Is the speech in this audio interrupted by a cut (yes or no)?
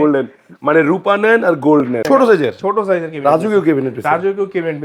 yes